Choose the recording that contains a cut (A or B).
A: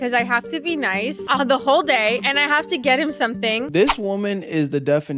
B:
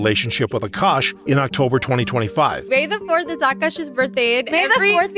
A